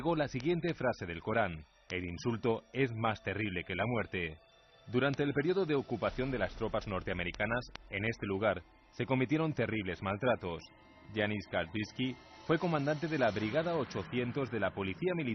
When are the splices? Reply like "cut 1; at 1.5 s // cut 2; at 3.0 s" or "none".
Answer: cut 1; at 1.0 s